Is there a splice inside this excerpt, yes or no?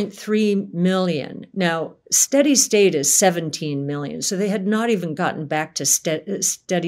no